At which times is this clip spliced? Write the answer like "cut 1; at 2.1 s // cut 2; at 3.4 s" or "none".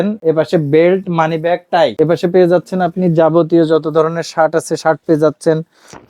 cut 1; at 1.9 s